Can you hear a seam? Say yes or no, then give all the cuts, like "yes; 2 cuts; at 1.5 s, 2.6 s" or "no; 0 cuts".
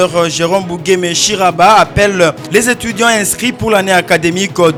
no; 0 cuts